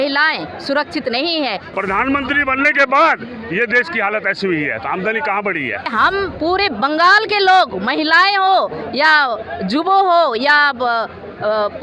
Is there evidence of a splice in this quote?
yes; 2 cuts; at 1.7 s, 5.9 s

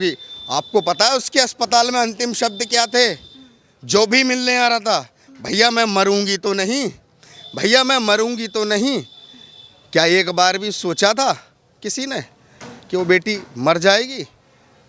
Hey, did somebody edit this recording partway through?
no; 0 cuts

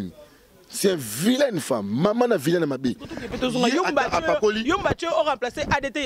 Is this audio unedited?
yes; 0 cuts

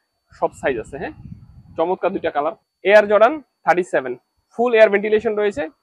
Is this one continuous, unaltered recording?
no; 1 cut; at 2.7 s

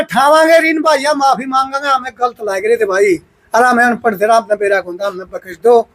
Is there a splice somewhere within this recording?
no; 0 cuts

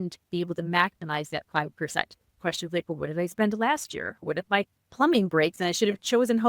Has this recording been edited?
yes; 2 cuts; at 2.4 s, 4.2 s

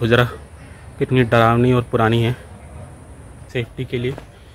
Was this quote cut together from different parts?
yes; 1 cut; at 3.4 s

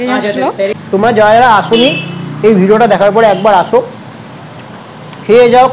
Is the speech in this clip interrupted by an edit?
yes; 1 cut; at 1.0 s

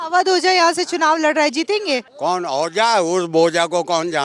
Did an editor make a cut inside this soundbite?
yes; 1 cut; at 2.1 s

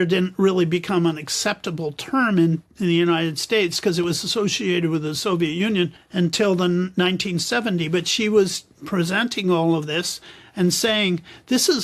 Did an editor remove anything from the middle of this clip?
yes; 1 cut; at 6.0 s

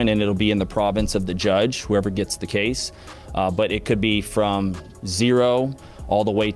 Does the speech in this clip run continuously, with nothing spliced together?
yes; 0 cuts

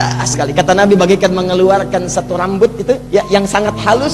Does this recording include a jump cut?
yes; 1 cut; at 3.0 s

